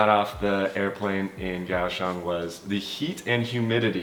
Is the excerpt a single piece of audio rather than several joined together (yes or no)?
yes